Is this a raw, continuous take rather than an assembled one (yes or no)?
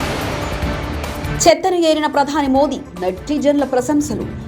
no